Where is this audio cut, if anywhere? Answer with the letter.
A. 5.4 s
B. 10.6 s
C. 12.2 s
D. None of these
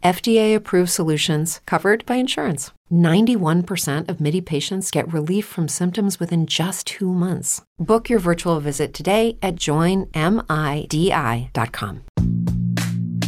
C